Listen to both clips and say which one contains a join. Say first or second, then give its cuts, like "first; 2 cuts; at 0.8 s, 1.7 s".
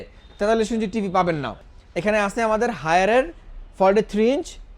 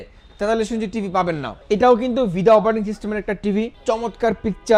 first; 1 cut; at 1.5 s